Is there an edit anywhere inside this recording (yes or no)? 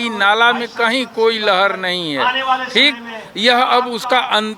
no